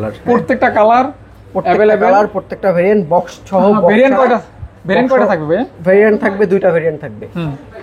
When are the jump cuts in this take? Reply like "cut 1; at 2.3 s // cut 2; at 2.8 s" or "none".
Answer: none